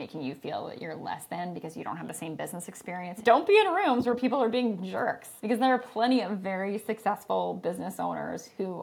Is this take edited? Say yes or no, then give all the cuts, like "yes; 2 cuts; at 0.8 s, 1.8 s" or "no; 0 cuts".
yes; 2 cuts; at 3.1 s, 5.3 s